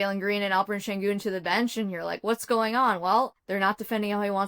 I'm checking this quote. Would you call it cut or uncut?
cut